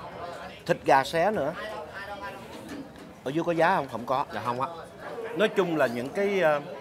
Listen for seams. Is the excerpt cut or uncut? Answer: cut